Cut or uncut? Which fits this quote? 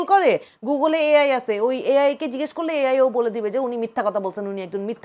uncut